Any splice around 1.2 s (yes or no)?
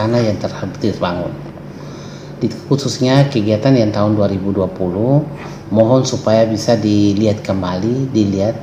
no